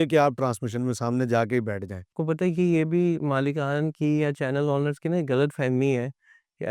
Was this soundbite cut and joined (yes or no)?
yes